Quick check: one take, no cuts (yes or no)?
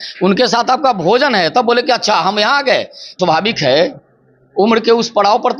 no